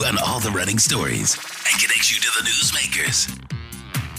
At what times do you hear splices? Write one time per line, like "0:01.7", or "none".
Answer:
none